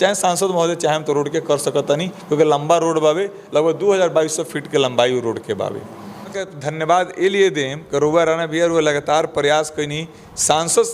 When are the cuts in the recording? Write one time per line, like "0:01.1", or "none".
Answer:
0:06.4